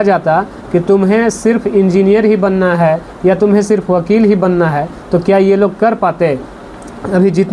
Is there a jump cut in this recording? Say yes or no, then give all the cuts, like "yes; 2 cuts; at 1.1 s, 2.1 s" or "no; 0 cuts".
no; 0 cuts